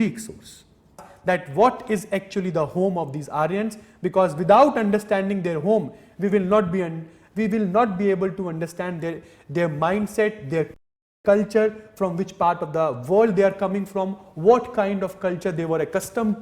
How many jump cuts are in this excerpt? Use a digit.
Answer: 1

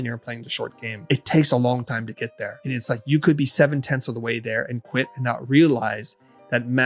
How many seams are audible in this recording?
2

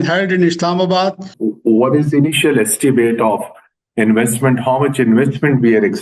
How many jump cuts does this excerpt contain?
1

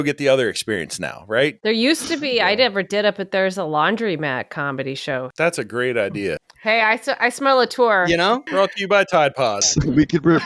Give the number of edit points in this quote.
4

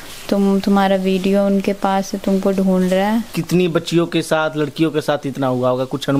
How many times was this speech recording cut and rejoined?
1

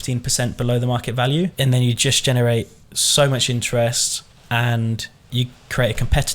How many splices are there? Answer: 1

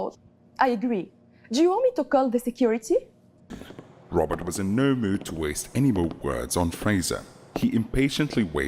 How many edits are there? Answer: 1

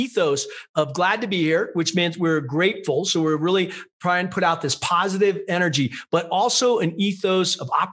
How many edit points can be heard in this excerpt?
0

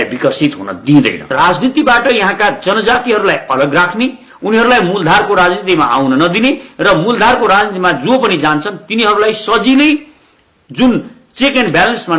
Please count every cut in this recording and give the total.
1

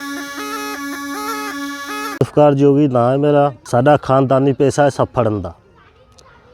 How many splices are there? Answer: 2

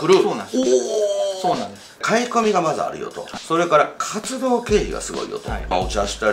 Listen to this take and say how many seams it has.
2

